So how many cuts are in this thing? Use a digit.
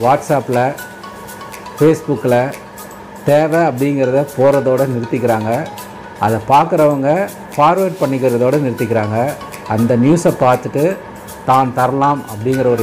0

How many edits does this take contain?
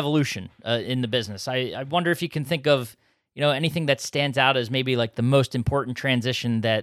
0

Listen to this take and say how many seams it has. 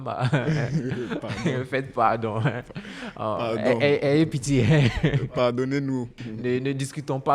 0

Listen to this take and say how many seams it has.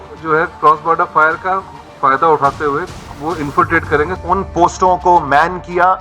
1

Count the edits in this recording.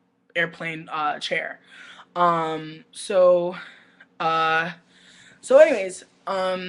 0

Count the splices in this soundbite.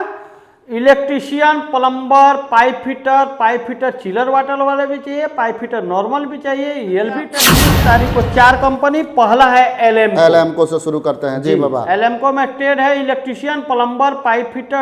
1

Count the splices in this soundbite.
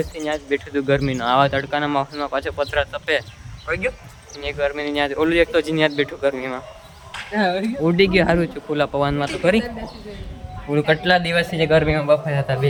0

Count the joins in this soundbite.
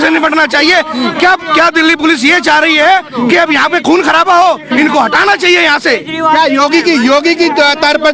0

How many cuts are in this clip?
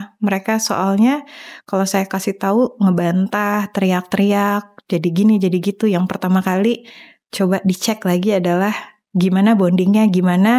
0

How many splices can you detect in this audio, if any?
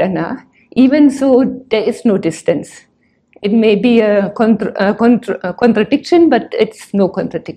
0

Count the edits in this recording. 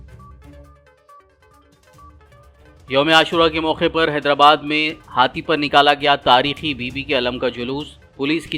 0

